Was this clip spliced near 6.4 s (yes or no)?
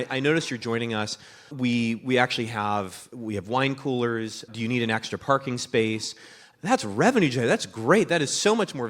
yes